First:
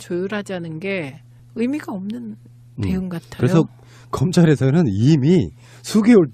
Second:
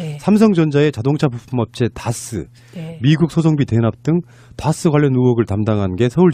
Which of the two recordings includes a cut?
second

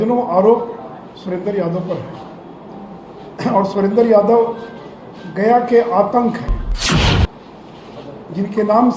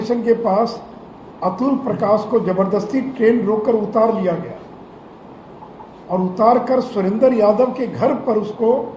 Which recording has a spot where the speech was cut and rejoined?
first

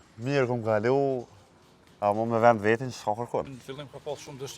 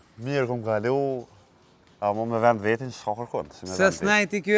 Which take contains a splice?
first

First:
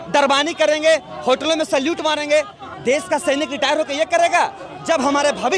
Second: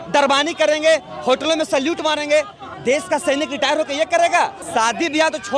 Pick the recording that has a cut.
second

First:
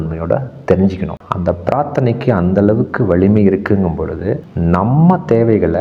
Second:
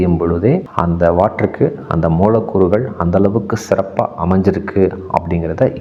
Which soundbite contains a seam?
first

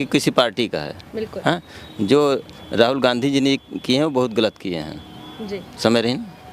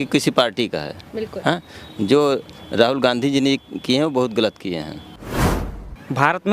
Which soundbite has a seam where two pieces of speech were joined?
second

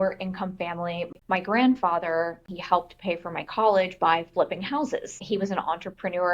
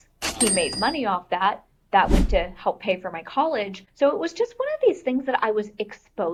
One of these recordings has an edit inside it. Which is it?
first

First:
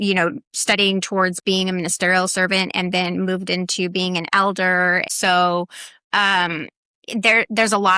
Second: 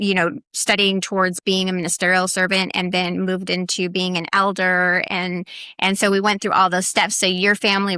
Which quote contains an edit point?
first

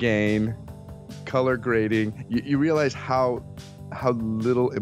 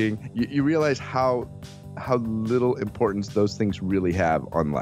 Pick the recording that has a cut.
first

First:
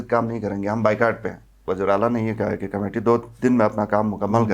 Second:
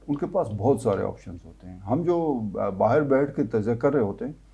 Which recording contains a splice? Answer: first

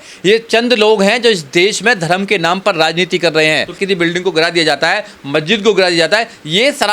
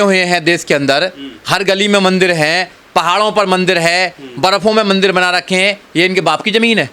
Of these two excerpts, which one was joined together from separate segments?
first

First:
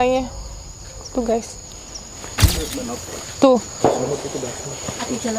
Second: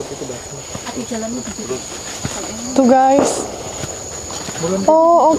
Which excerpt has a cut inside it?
first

